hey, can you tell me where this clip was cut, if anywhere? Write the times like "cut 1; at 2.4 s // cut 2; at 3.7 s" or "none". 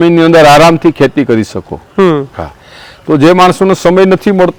none